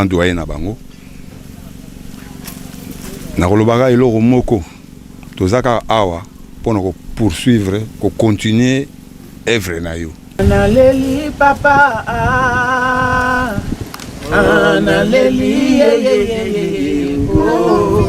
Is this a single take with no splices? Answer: no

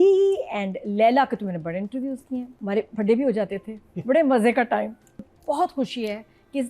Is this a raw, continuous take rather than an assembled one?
no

